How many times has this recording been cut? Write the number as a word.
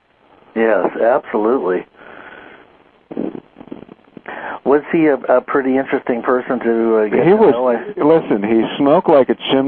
one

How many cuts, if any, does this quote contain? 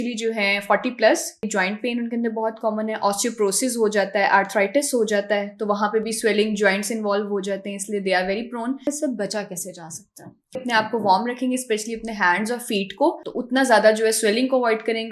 four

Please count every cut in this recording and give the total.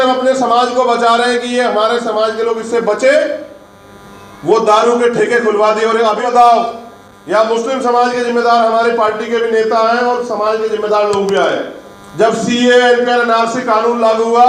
one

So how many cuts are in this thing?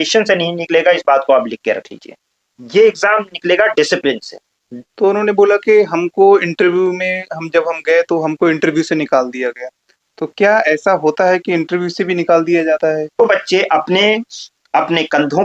two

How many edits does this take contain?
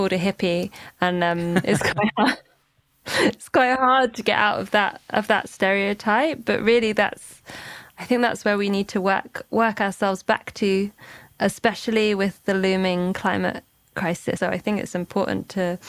one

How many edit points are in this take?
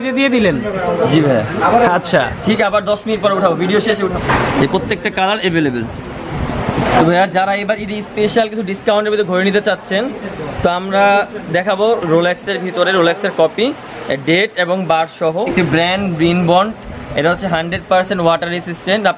two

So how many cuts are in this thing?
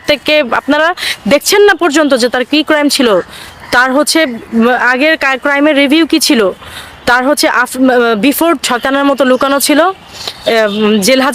one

